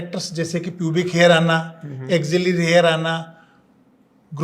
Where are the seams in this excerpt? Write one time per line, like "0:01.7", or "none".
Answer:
none